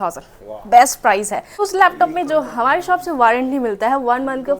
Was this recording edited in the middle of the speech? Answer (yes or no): yes